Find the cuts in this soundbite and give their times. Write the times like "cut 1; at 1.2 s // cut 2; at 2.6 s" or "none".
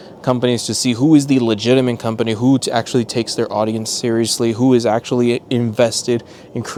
none